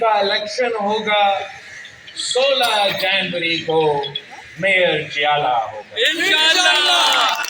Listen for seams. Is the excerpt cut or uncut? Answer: uncut